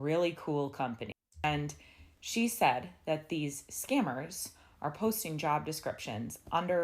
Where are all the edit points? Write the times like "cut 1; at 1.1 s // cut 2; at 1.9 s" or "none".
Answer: cut 1; at 1.1 s